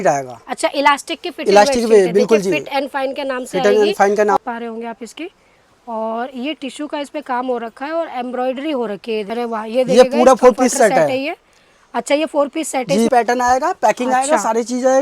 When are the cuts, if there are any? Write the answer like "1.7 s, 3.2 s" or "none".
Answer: 4.4 s, 9.3 s, 13.1 s